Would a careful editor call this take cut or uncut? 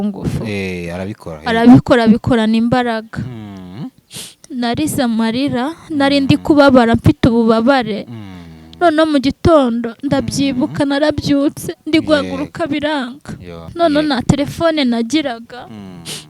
cut